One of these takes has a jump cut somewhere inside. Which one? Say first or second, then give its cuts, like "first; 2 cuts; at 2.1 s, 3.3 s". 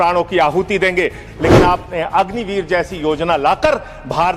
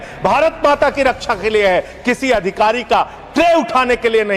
first; 1 cut; at 1.3 s